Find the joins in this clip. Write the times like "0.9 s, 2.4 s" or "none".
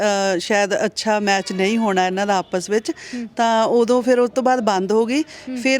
none